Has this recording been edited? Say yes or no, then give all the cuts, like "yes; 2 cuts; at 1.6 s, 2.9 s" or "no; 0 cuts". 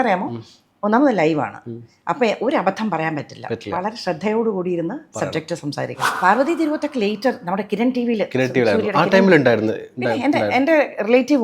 yes; 1 cut; at 6.1 s